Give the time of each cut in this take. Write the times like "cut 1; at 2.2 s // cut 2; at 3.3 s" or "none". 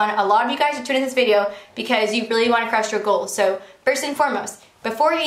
none